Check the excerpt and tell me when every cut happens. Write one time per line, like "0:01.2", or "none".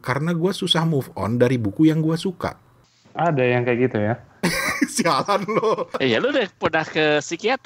0:05.9

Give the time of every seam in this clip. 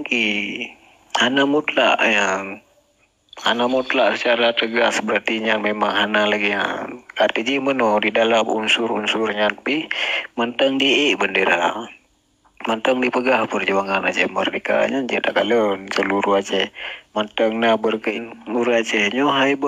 0:18.2

